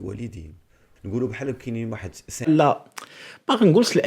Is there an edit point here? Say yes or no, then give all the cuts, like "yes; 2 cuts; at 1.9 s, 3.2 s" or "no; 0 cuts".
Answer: yes; 2 cuts; at 0.9 s, 2.5 s